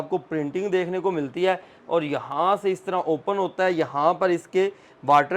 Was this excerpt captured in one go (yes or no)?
yes